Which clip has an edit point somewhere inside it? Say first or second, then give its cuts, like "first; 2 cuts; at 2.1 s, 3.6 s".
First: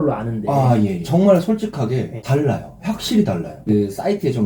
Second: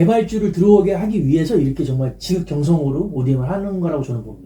first; 3 cuts; at 1.0 s, 2.2 s, 3.7 s